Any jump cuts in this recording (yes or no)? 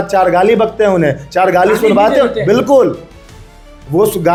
no